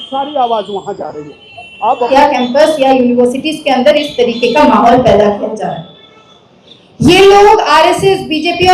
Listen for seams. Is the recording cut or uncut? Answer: cut